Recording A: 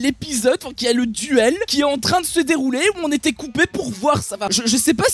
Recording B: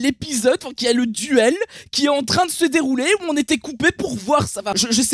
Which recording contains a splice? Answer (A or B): A